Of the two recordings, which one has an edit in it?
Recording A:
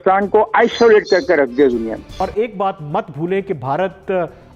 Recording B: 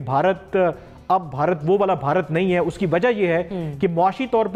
A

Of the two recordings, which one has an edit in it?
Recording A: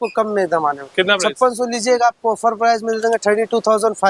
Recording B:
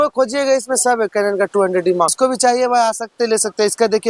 B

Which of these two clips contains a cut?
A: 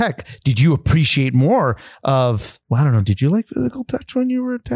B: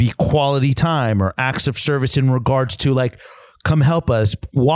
A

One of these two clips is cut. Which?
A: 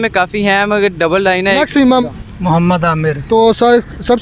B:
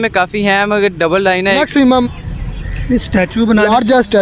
B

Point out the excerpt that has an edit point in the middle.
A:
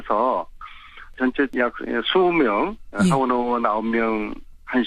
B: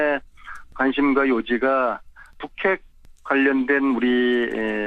A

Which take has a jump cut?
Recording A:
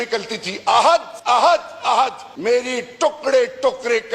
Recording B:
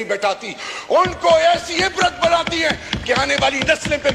A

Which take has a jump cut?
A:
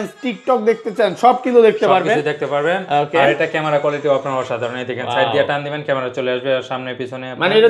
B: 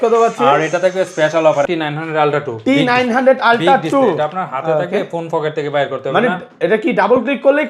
B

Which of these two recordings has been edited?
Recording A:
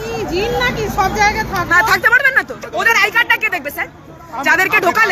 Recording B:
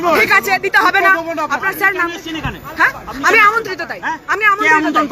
A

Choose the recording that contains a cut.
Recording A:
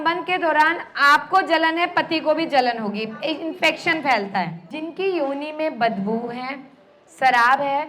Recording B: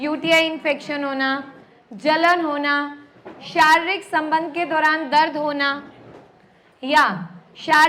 A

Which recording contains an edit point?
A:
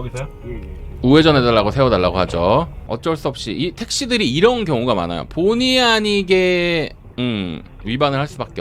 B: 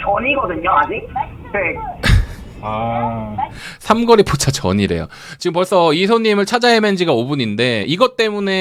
A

